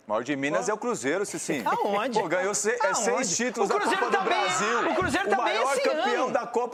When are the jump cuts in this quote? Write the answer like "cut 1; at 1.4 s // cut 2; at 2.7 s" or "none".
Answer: none